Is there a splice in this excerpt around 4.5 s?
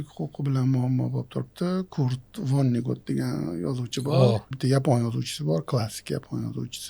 yes; 1 cut; at 4.5 s

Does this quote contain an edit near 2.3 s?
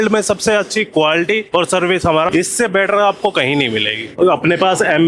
yes; 3 cuts; at 1.4 s, 2.3 s, 4.1 s

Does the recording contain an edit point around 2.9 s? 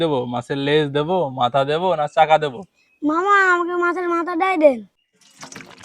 no; 1 cut; at 4.9 s

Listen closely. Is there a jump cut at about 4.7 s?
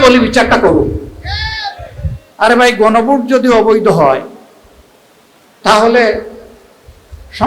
no; 1 cut; at 2.2 s

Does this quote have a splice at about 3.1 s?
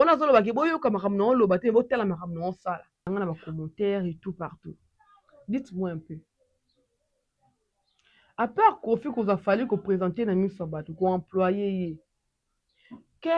yes; 1 cut; at 3.1 s

